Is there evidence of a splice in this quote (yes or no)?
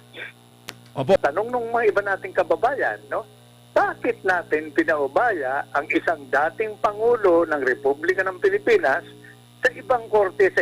yes